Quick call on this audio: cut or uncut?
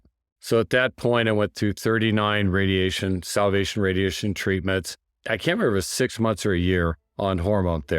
cut